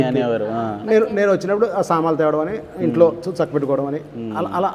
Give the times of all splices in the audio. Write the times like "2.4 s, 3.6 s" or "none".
none